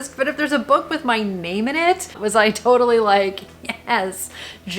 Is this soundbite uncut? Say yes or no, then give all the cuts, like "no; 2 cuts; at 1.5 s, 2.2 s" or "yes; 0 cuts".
no; 1 cut; at 2.1 s